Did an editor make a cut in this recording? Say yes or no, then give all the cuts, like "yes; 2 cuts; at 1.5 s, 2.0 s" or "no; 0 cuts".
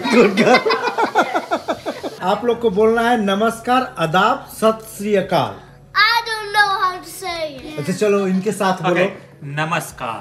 yes; 1 cut; at 2.1 s